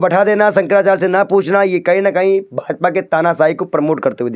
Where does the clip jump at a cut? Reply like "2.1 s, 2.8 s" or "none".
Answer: none